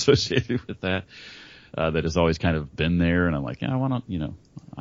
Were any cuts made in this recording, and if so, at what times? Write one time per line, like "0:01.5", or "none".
none